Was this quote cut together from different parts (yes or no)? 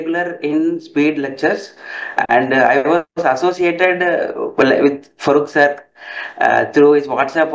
no